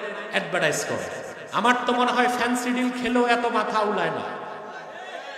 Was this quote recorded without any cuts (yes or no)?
no